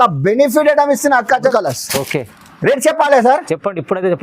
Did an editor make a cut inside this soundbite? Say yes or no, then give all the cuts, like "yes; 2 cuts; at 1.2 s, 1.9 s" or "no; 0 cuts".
yes; 1 cut; at 1.5 s